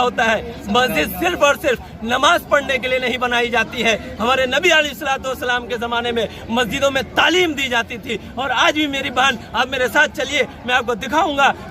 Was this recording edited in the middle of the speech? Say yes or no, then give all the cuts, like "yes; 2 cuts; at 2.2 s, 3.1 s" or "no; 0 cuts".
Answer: no; 0 cuts